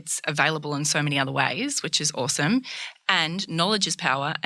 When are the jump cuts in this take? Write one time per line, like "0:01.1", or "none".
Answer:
none